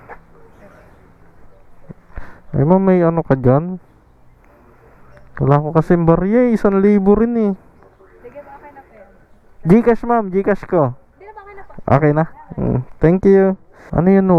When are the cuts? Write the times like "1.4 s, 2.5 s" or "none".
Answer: none

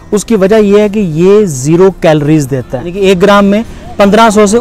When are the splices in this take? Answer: 2.8 s

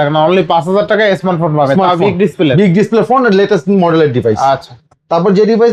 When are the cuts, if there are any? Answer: none

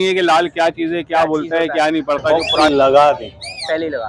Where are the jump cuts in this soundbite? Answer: 2.5 s

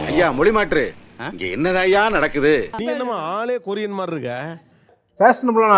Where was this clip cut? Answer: 2.8 s

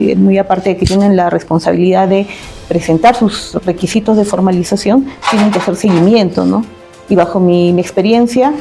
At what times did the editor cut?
none

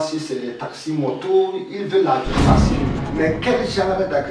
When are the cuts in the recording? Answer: 2.8 s

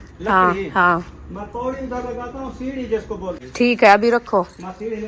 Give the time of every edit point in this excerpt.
3.4 s

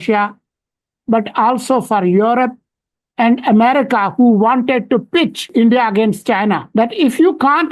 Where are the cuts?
5.4 s, 6.6 s

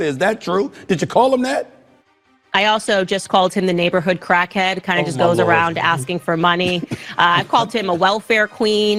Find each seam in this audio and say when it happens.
none

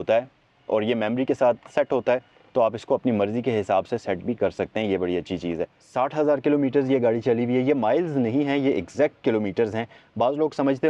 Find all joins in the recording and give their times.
5.8 s

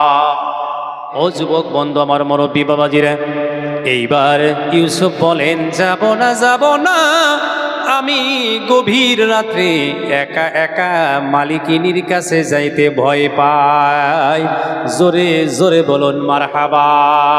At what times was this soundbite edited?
1.1 s

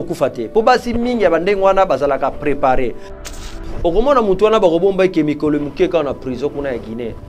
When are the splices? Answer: 3.2 s

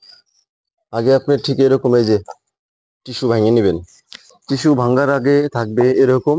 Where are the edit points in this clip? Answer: none

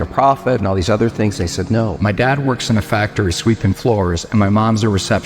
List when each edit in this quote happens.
2.0 s

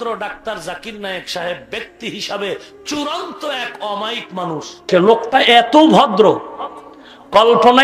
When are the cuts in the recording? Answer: none

